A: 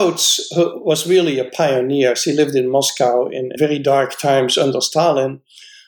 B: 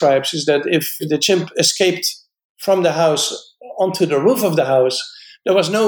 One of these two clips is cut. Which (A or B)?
B